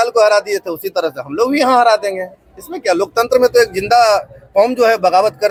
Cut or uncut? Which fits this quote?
uncut